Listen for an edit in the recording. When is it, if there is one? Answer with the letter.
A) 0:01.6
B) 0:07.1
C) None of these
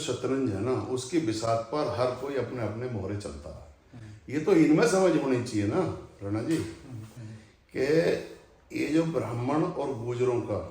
B